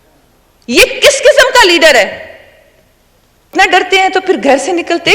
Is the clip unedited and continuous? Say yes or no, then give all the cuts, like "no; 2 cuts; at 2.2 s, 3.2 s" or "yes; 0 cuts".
no; 1 cut; at 3.5 s